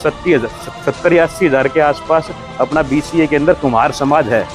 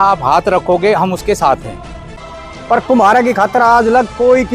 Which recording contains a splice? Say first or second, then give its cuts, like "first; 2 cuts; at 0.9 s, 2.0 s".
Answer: second; 1 cut; at 2.2 s